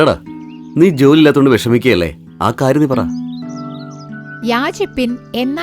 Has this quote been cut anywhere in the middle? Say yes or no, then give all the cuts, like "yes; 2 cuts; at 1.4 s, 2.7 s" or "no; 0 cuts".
yes; 1 cut; at 4.0 s